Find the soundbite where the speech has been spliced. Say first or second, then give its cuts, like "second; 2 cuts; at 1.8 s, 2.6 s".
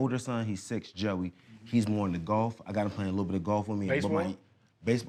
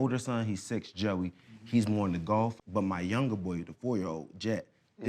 second; 1 cut; at 2.6 s